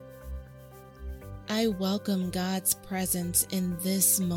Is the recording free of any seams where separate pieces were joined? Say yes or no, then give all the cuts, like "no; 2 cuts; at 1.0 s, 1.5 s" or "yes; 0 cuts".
no; 1 cut; at 1.4 s